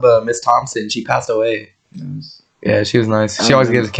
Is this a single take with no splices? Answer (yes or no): yes